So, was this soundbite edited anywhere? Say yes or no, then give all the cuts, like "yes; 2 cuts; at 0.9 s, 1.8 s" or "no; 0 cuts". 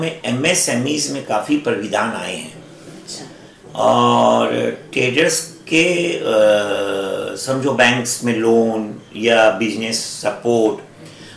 no; 0 cuts